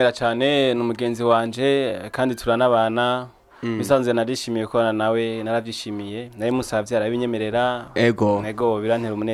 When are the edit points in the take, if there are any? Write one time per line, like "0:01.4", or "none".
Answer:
none